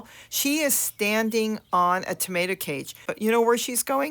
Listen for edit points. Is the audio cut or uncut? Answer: cut